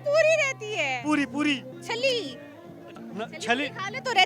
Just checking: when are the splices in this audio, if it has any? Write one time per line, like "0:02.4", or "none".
0:01.8